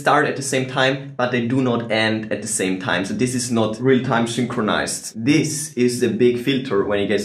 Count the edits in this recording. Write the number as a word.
one